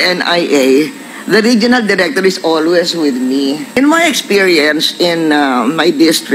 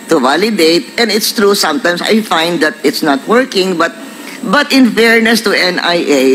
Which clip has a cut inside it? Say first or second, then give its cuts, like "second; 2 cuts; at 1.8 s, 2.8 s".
first; 1 cut; at 3.8 s